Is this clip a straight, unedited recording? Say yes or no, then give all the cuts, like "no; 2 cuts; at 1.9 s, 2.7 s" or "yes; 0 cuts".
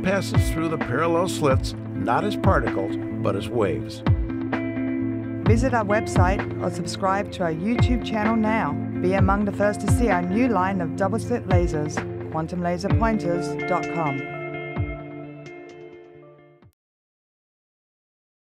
yes; 0 cuts